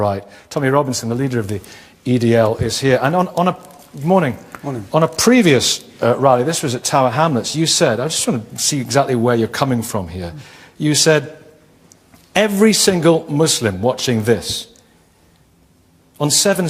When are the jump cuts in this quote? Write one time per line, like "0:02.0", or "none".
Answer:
0:14.2